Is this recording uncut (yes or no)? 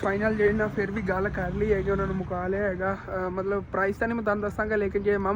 yes